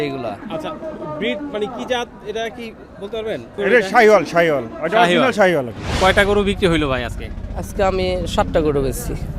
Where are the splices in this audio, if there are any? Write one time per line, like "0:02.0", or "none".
0:05.8